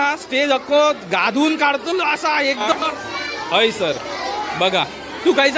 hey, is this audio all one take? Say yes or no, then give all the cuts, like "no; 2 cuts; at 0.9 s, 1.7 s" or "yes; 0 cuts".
no; 1 cut; at 2.7 s